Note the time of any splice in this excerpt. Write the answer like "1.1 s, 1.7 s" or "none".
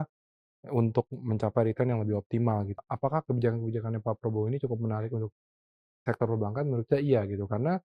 2.7 s